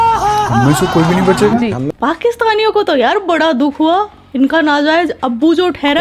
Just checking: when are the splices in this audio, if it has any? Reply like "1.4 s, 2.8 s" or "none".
1.9 s